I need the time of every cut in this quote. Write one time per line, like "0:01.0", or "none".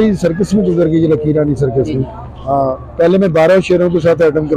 none